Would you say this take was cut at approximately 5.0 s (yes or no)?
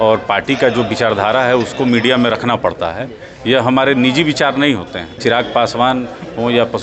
yes